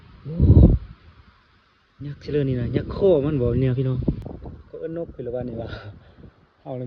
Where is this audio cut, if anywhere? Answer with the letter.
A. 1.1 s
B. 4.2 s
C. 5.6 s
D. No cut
B